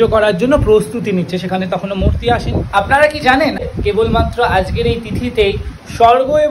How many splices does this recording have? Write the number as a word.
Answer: two